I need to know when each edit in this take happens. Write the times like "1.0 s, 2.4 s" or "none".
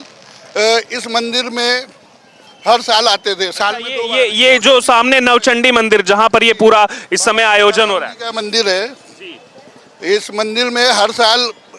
none